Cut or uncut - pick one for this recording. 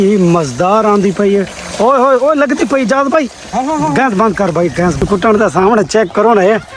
cut